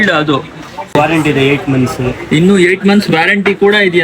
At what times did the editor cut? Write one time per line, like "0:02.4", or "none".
0:00.9